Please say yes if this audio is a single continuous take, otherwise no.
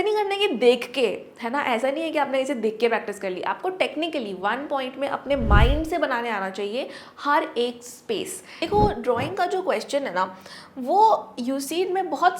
no